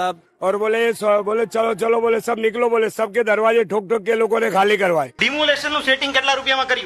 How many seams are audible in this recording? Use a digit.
1